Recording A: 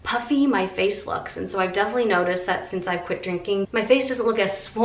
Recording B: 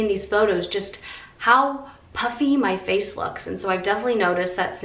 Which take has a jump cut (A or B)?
A